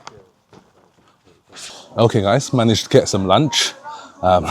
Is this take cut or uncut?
cut